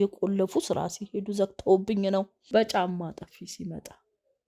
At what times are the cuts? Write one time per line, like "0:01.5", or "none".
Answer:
0:02.4